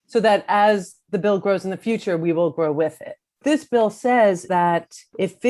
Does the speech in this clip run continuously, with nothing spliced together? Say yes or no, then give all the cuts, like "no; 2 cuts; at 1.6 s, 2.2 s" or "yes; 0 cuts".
no; 2 cuts; at 3.4 s, 4.4 s